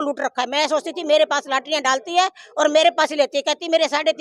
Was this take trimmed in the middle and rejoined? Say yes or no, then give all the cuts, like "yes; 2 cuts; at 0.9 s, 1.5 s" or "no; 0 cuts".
no; 0 cuts